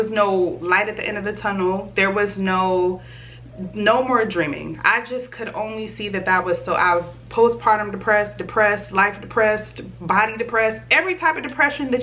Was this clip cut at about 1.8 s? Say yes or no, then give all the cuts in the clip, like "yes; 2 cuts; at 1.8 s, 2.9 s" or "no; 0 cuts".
no; 0 cuts